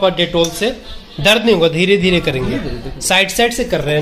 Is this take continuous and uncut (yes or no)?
yes